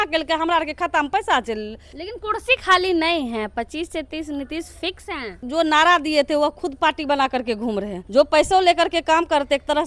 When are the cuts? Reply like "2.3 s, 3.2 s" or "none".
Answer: 1.9 s, 5.4 s, 8.0 s